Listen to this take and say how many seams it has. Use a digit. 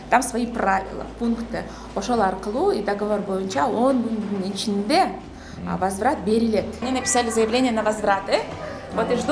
1